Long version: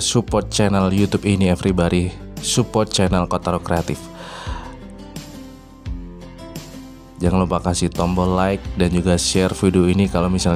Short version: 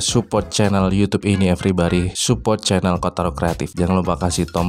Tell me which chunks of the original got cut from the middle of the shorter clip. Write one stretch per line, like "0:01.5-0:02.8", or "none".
0:02.1-0:02.4
0:03.9-0:07.1